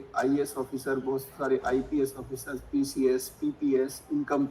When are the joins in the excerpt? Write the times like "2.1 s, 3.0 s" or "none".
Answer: none